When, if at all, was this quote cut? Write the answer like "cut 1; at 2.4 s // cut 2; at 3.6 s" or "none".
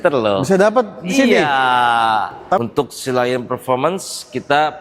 cut 1; at 2.6 s

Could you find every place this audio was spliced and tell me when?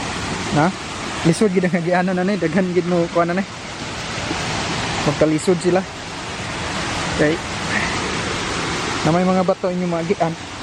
none

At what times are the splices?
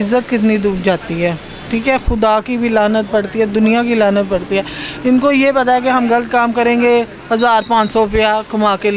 none

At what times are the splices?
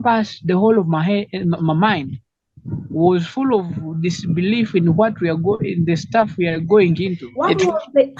cut 1; at 7.2 s

